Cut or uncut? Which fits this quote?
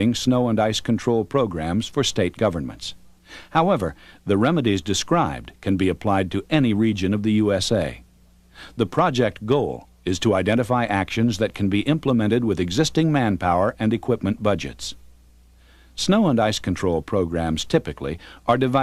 uncut